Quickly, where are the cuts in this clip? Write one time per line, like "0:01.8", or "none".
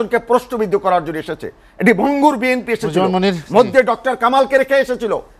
none